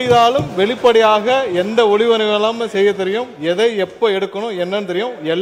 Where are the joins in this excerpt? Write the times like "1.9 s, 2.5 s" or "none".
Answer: none